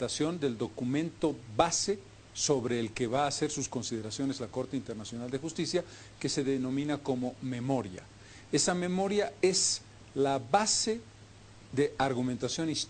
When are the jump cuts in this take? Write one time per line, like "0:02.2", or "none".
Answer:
0:06.9